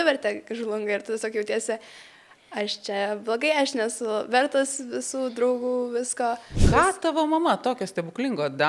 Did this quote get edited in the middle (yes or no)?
yes